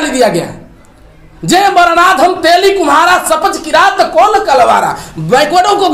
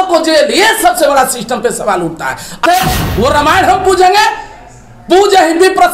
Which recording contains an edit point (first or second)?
second